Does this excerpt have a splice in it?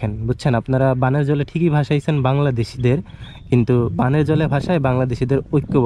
no; 0 cuts

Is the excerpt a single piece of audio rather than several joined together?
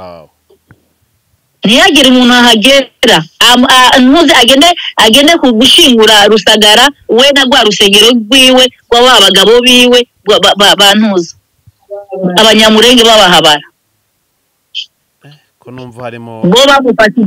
yes; 0 cuts

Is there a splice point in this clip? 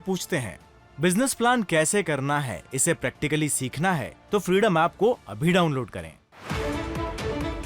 yes; 1 cut; at 6.4 s

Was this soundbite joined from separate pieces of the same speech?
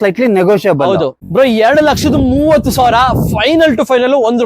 yes; 1 cut; at 1.2 s

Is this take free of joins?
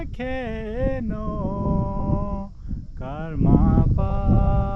yes; 0 cuts

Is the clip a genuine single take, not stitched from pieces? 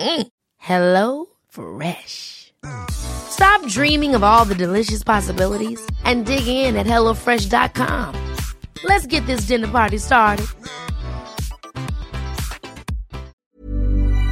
no; 1 cut; at 13.3 s

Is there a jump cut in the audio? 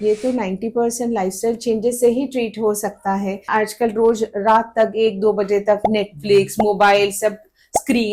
yes; 1 cut; at 3.4 s

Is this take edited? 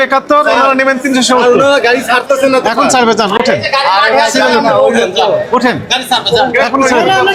no; 0 cuts

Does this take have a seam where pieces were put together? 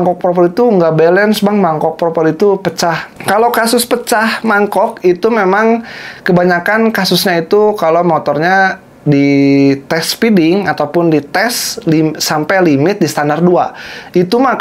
no; 0 cuts

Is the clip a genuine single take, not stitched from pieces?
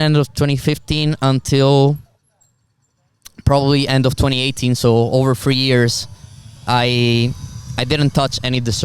yes; 0 cuts

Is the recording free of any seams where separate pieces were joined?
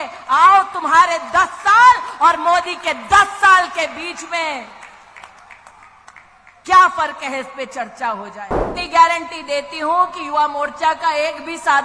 no; 1 cut; at 8.7 s

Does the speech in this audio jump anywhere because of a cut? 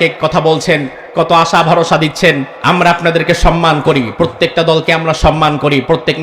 yes; 1 cut; at 2.5 s

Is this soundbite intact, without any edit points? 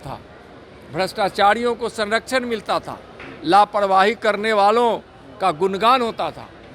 yes; 0 cuts

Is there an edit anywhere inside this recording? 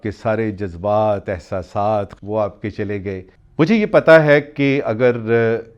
yes; 2 cuts; at 2.1 s, 3.4 s

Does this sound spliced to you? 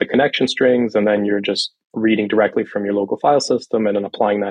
no; 0 cuts

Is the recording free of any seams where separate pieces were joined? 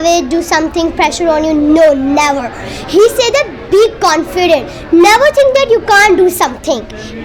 yes; 0 cuts

